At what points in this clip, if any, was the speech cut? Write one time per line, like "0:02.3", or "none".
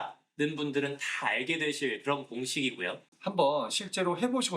0:03.1